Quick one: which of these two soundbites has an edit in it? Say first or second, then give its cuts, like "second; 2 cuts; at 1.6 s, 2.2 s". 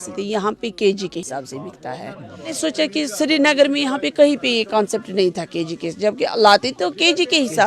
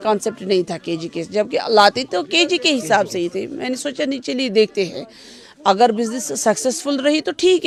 first; 2 cuts; at 1.2 s, 2.6 s